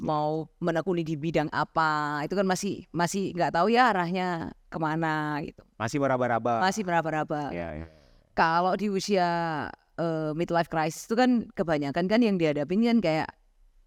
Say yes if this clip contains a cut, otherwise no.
no